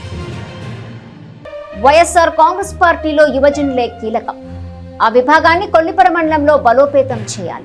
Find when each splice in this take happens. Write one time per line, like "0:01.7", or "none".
0:00.9